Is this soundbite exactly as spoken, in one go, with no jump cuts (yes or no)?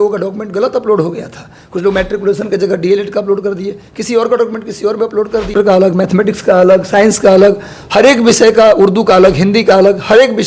no